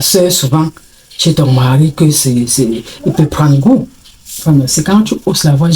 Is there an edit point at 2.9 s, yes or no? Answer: no